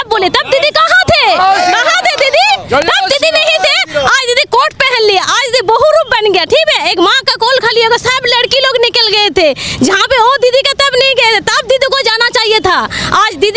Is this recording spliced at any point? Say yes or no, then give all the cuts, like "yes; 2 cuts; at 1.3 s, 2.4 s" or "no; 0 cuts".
no; 0 cuts